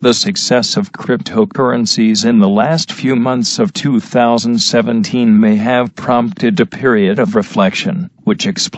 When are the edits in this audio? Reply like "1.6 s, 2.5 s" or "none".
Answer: 6.5 s